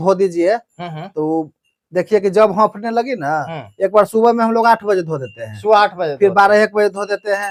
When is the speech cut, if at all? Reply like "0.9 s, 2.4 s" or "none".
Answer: none